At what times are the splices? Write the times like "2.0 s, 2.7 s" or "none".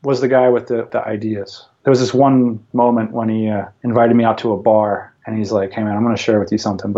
1.4 s, 2.6 s, 3.7 s, 5.2 s